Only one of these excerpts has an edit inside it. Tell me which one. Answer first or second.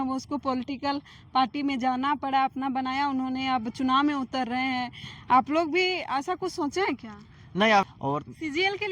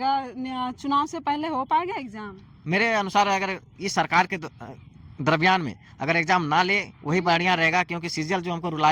first